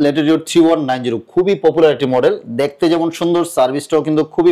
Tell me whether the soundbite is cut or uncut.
uncut